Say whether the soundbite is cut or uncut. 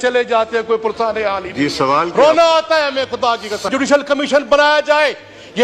cut